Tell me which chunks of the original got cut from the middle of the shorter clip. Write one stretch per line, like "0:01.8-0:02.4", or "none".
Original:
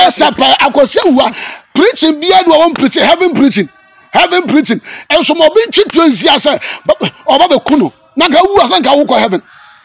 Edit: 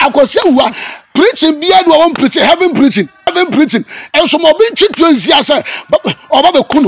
0:03.9-0:04.3